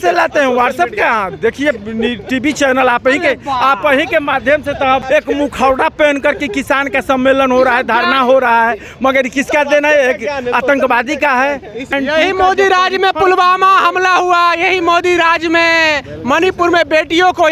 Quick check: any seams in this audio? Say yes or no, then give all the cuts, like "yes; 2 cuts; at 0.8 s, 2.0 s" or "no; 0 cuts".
yes; 2 cuts; at 5.0 s, 11.9 s